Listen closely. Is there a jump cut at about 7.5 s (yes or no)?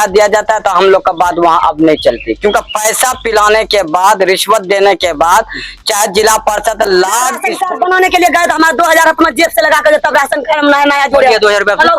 yes